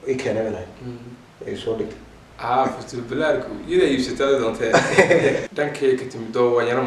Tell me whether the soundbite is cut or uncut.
cut